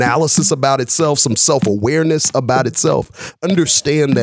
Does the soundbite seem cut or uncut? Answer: uncut